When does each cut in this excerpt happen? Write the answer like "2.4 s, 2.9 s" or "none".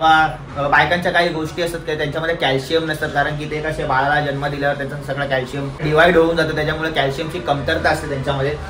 5.8 s